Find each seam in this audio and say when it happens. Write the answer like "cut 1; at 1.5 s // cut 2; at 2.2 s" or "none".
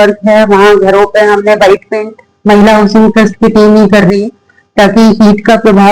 none